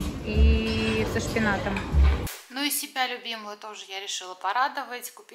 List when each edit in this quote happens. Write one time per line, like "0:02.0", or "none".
0:02.3